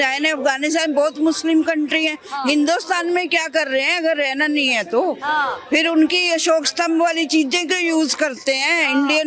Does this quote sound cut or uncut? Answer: uncut